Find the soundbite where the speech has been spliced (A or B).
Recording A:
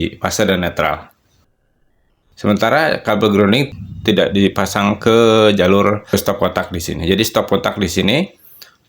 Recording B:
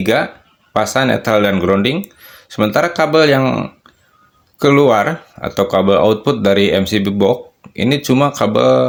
A